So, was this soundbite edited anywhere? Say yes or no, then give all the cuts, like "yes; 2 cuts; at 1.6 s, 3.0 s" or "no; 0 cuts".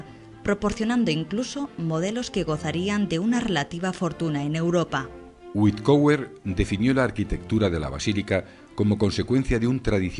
yes; 1 cut; at 5.6 s